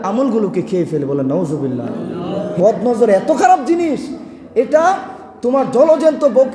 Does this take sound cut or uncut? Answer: cut